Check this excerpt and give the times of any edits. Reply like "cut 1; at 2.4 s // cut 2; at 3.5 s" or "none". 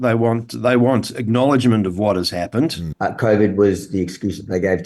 cut 1; at 2.8 s